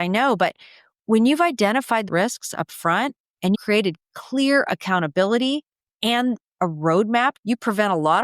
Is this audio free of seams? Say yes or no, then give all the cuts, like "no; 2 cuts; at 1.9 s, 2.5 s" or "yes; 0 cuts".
no; 3 cuts; at 2.0 s, 3.6 s, 7.4 s